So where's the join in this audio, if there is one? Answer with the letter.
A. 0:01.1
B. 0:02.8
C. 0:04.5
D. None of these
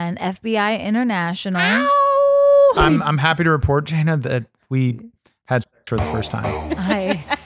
B